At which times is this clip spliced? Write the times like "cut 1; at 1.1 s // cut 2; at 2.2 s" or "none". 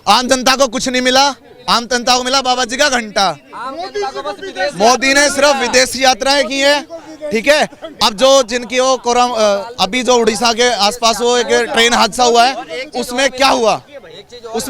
none